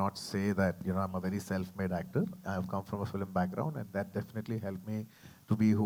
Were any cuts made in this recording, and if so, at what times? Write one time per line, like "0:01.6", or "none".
none